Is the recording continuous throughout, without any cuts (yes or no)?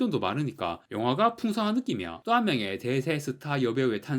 no